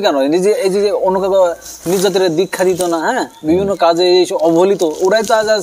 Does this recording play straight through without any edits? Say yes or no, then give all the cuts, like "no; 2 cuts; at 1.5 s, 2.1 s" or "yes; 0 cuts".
yes; 0 cuts